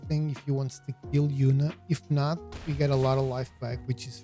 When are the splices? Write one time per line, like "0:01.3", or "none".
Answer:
none